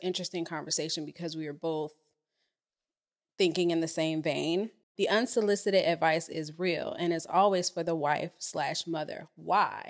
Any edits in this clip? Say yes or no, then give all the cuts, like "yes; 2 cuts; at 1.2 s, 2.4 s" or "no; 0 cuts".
yes; 1 cut; at 4.9 s